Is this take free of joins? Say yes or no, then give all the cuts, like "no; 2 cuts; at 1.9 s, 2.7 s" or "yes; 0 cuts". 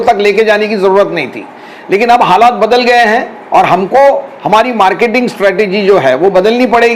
yes; 0 cuts